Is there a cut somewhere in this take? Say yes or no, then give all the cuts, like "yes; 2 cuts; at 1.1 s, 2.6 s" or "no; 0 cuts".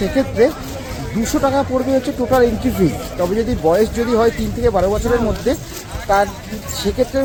no; 0 cuts